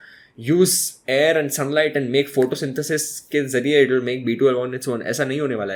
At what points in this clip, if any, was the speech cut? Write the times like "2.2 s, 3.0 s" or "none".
none